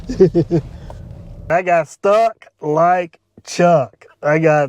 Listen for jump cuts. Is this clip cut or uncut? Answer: cut